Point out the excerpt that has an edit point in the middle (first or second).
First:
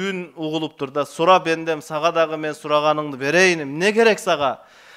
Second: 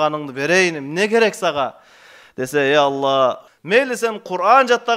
second